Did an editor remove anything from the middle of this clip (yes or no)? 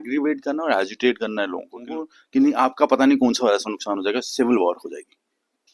yes